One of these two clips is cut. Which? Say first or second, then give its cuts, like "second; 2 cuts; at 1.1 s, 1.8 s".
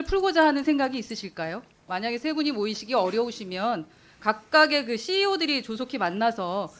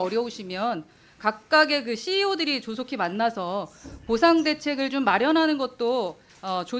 first; 1 cut; at 1.8 s